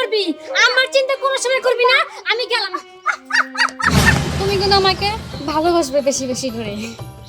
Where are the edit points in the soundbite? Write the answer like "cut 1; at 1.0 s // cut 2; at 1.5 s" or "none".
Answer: cut 1; at 4.3 s